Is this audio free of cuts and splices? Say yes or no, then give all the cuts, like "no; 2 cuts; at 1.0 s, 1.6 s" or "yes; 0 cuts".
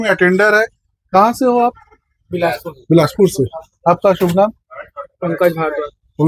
yes; 0 cuts